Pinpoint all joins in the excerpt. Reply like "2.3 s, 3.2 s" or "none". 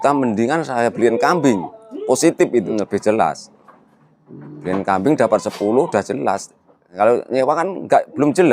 2.7 s, 6.9 s